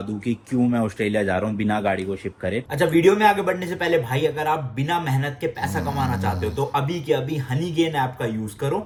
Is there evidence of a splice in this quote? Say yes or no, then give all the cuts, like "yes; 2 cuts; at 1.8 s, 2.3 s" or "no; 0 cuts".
no; 0 cuts